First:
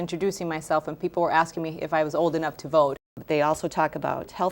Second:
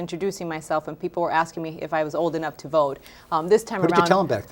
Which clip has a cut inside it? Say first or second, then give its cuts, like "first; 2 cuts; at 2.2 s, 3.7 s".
first; 1 cut; at 3.2 s